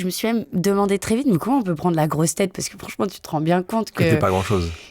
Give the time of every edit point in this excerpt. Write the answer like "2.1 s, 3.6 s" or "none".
none